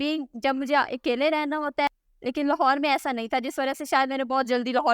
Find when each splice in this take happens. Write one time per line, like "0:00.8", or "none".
0:01.9